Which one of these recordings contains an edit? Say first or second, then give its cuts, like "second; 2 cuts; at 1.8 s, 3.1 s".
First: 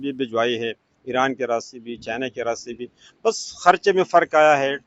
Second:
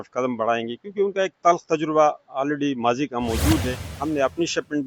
second; 1 cut; at 3.9 s